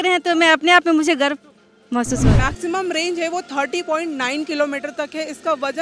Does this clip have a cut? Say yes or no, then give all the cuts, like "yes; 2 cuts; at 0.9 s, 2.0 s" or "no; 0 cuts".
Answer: yes; 1 cut; at 2.3 s